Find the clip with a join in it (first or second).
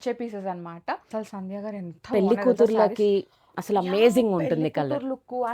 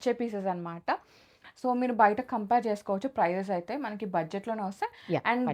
first